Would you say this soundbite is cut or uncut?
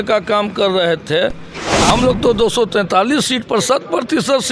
cut